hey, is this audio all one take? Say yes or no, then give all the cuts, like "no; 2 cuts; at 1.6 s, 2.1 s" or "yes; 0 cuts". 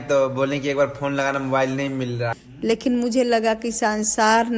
no; 1 cut; at 2.4 s